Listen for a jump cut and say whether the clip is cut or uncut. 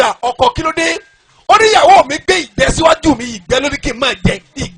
uncut